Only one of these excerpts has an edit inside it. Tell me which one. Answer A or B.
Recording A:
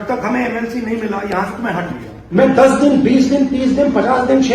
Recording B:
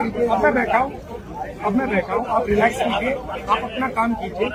A